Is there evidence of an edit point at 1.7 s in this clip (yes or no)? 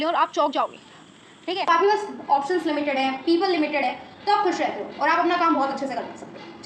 yes